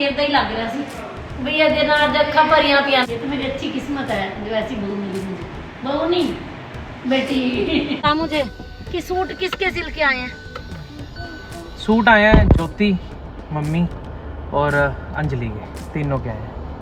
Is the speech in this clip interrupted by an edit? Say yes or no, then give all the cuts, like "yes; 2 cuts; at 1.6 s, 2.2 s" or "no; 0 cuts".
yes; 2 cuts; at 3.1 s, 8.1 s